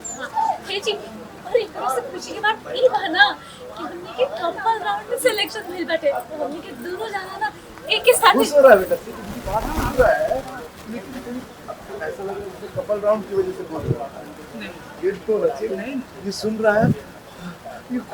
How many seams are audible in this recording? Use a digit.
0